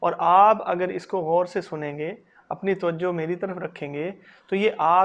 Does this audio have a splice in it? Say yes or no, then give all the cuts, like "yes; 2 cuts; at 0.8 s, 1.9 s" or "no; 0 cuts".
no; 0 cuts